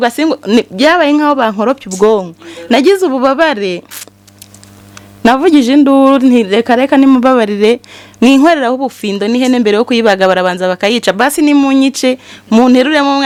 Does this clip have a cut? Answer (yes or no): no